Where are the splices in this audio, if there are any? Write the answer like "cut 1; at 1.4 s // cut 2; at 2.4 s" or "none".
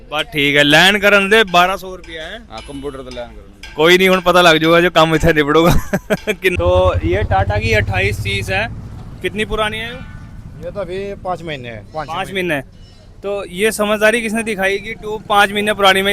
cut 1; at 6.5 s